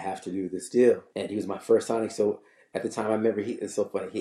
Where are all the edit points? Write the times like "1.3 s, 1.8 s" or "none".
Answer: 1.1 s